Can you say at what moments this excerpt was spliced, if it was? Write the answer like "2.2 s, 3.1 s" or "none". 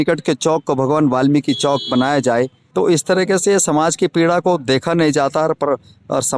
2.6 s